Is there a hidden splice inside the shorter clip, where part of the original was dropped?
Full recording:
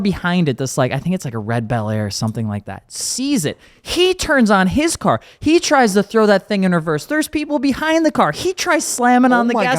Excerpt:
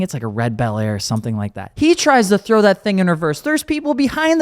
yes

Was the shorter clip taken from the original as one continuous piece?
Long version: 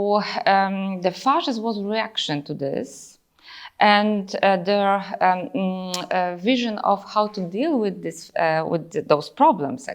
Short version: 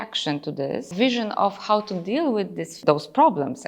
no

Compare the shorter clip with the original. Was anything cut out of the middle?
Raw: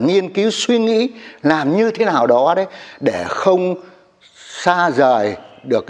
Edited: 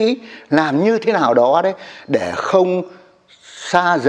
no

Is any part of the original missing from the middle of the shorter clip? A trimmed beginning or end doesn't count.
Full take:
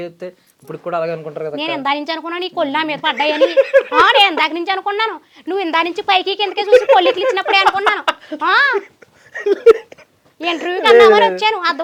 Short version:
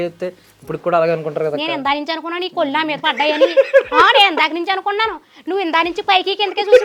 no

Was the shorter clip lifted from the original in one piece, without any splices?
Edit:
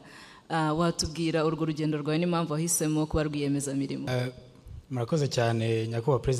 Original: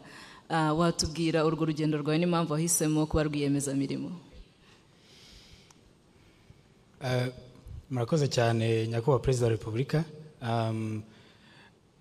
no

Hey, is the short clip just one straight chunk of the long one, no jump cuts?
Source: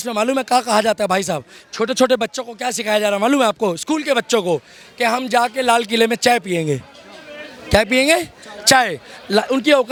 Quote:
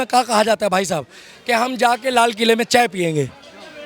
no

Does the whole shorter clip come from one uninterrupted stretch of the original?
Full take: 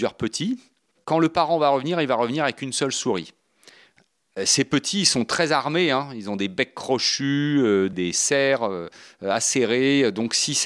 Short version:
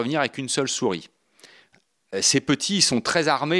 yes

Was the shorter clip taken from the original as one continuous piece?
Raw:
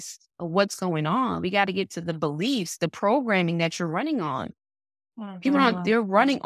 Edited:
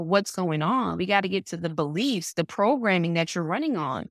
yes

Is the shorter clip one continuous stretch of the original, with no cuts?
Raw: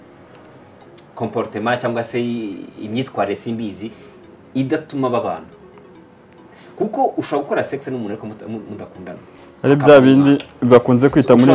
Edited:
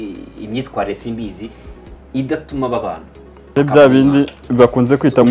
no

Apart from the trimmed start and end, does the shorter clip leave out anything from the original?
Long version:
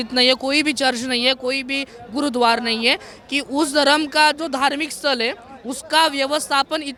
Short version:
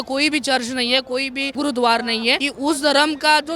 yes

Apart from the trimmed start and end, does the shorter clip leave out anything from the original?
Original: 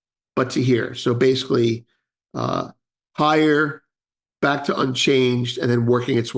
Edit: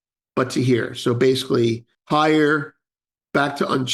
yes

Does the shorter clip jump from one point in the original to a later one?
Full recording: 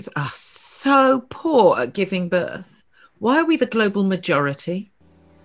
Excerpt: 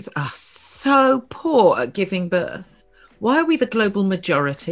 no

